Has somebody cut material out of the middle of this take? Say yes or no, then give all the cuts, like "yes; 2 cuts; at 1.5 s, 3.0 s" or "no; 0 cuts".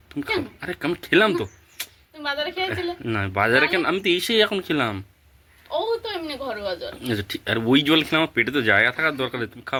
no; 0 cuts